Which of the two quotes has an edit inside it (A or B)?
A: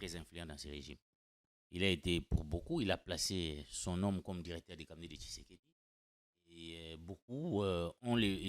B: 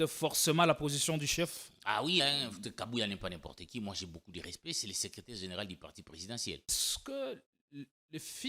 B